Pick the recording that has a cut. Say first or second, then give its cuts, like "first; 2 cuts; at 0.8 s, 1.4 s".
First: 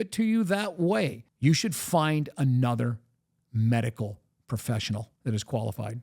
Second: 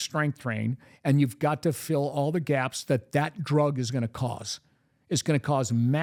first; 2 cuts; at 1.2 s, 5.1 s